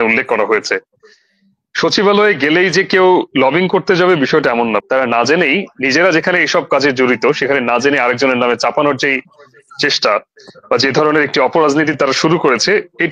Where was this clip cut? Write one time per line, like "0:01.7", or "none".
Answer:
0:04.8